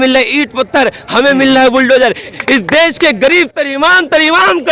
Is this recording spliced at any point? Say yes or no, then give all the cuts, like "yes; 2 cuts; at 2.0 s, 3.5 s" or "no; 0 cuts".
yes; 1 cut; at 2.3 s